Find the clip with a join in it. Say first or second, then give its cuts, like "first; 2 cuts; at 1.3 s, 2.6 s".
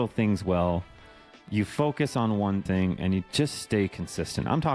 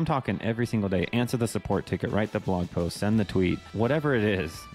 second; 1 cut; at 3.7 s